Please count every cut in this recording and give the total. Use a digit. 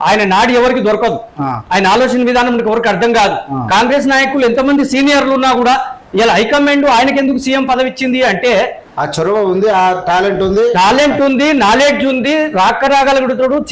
1